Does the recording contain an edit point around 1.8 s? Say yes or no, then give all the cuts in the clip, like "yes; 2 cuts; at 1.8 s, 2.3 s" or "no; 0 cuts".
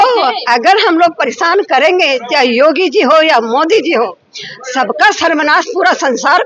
no; 0 cuts